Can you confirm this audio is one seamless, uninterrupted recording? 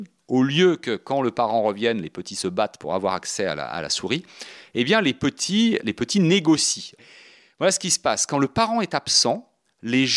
no; 2 cuts; at 5.9 s, 7.1 s

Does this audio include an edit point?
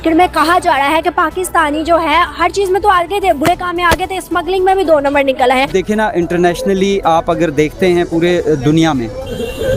yes; 1 cut; at 5.7 s

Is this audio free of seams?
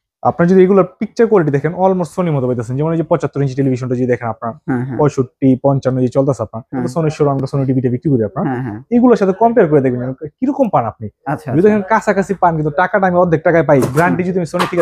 no; 1 cut; at 6.9 s

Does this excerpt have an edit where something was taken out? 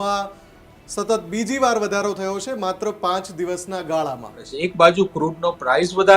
yes; 1 cut; at 4.5 s

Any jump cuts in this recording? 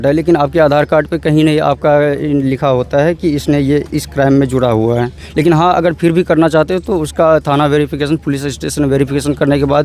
no; 0 cuts

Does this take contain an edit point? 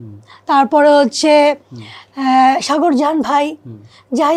no; 0 cuts

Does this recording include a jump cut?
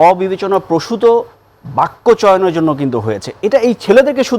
no; 0 cuts

